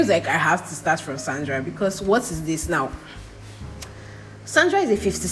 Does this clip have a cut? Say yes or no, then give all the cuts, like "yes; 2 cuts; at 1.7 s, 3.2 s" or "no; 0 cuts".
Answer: no; 0 cuts